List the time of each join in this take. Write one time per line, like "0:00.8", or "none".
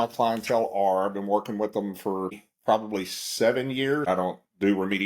0:02.5
0:04.1